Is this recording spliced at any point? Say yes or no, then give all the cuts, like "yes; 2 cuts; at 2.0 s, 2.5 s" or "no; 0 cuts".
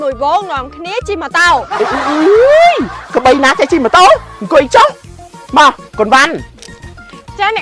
no; 0 cuts